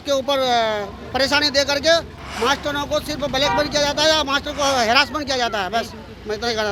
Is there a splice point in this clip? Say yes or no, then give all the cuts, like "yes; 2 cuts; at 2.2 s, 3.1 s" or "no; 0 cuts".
no; 0 cuts